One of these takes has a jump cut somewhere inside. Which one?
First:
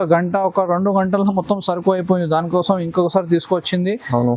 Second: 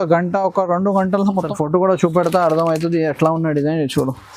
second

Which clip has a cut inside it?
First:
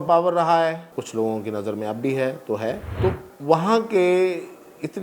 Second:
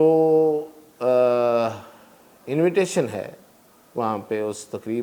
first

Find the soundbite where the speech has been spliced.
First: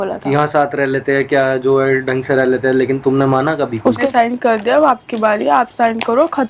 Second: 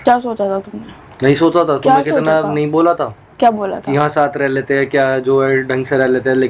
first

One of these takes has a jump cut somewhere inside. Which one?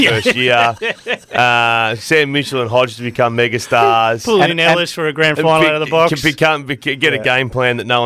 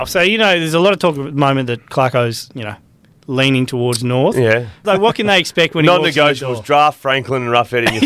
second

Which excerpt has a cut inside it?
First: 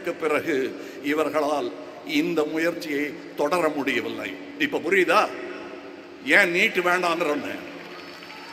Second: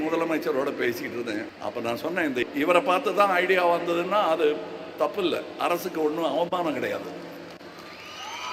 second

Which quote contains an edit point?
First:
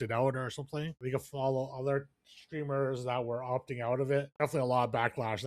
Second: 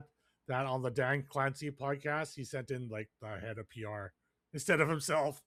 first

